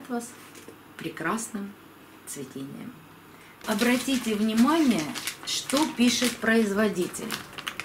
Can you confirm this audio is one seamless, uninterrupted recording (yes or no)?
no